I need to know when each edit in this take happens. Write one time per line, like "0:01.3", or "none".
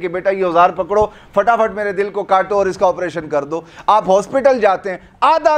none